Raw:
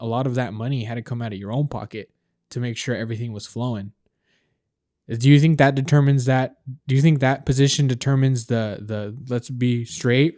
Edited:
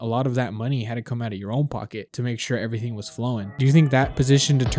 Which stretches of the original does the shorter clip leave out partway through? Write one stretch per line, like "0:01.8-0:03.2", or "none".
0:02.1-0:02.5
0:03.9-0:06.8